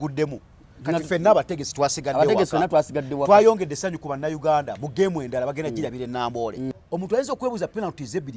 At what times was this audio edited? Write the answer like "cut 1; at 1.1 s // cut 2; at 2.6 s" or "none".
cut 1; at 6.7 s